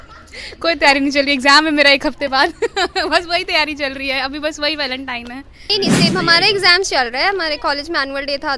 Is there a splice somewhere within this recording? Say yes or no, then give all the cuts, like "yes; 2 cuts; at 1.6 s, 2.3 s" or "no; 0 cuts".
yes; 1 cut; at 5.5 s